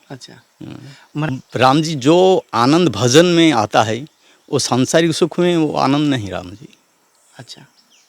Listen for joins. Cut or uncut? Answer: cut